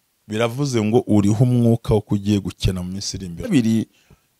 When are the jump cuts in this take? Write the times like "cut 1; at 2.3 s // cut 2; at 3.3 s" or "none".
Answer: cut 1; at 3.5 s